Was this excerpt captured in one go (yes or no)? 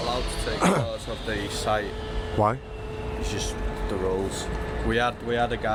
yes